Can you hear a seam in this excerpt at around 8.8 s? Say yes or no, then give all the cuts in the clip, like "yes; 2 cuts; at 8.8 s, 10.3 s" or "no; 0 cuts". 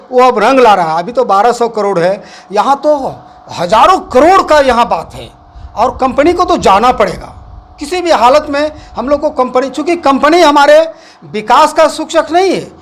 no; 0 cuts